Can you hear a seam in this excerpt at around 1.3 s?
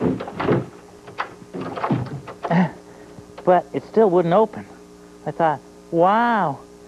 no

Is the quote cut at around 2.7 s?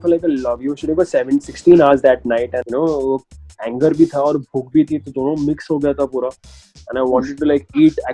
yes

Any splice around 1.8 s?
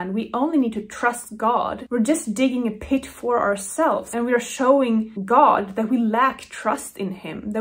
yes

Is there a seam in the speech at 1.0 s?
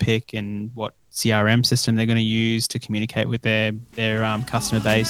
no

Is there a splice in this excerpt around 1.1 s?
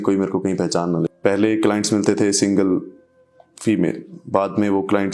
yes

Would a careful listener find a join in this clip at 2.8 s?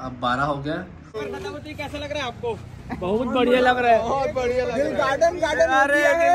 no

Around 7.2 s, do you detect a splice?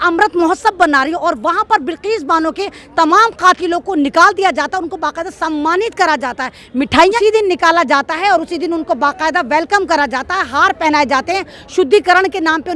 yes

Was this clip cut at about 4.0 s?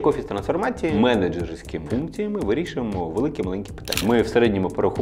yes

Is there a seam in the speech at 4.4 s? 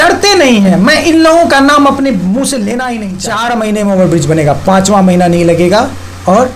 no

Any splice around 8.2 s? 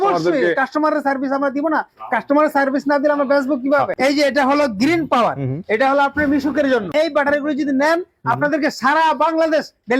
no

